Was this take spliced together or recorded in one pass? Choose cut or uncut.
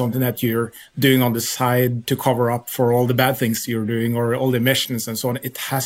uncut